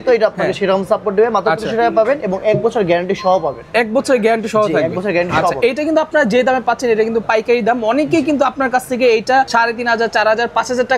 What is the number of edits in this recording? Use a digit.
0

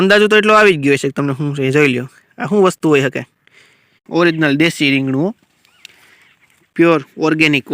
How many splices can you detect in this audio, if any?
1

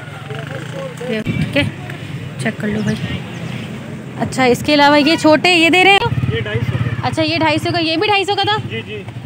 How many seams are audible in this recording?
2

